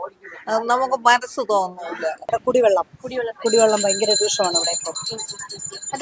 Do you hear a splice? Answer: yes; 1 cut; at 2.2 s

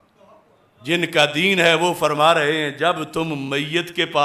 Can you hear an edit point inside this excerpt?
no; 0 cuts

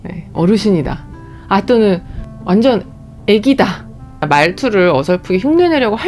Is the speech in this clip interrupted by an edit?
yes; 2 cuts; at 2.2 s, 4.2 s

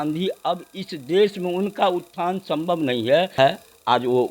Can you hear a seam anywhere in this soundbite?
yes; 1 cut; at 3.3 s

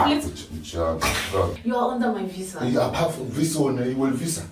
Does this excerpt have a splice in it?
yes; 1 cut; at 1.6 s

